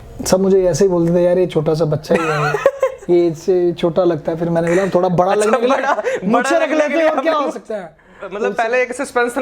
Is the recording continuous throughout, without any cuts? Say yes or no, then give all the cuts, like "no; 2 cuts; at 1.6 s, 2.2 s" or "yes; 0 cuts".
no; 1 cut; at 8.4 s